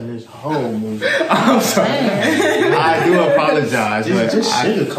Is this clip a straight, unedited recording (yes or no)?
yes